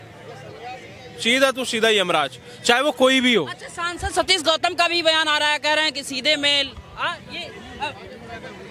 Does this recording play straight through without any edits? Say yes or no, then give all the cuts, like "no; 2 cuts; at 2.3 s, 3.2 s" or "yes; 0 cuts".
yes; 0 cuts